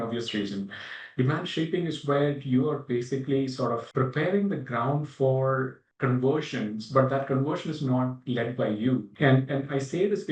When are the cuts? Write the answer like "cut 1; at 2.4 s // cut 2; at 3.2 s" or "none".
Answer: cut 1; at 9.1 s